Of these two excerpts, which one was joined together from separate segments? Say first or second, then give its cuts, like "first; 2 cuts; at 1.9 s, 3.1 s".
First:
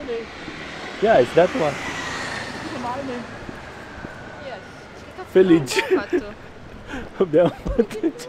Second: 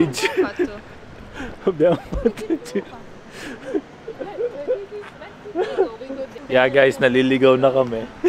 second; 1 cut; at 6.4 s